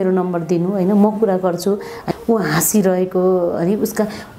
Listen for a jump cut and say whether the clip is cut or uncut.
cut